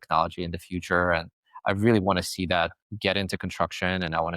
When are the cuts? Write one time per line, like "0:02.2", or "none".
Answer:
0:02.8

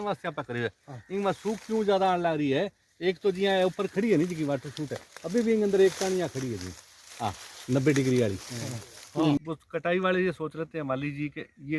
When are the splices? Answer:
0:09.4

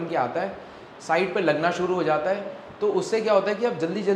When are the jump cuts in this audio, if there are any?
none

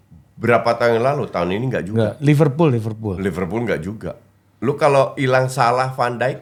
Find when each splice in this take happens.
none

